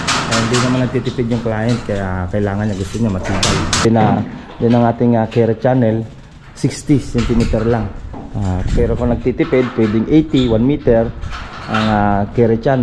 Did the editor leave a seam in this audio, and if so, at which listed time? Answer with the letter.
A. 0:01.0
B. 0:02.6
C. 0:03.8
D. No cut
C